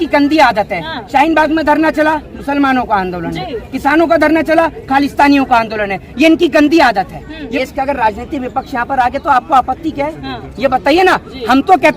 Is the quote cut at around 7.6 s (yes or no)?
yes